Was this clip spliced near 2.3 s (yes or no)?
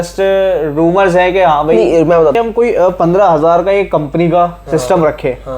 yes